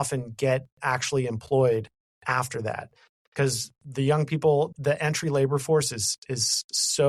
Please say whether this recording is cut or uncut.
uncut